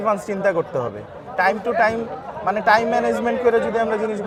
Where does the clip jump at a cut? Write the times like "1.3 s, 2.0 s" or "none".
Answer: none